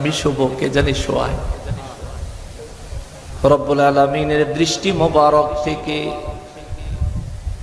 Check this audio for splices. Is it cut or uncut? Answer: cut